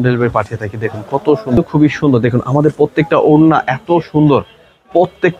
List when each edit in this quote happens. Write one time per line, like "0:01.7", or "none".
0:01.6